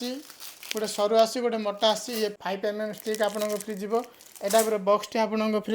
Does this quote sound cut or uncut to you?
cut